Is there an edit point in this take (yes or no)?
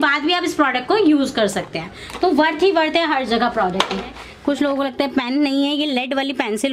yes